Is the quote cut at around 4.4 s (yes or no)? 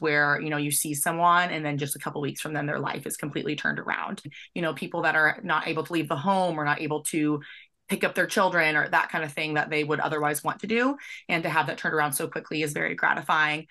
yes